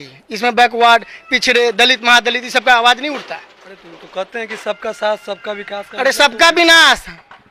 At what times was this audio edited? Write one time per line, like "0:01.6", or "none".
none